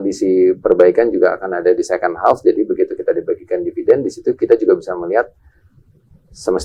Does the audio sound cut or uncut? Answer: uncut